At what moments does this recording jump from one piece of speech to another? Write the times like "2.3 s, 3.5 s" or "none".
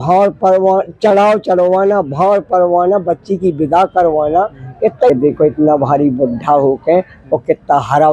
5.1 s